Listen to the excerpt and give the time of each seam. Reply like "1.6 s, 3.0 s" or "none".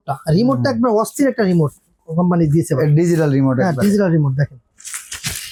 none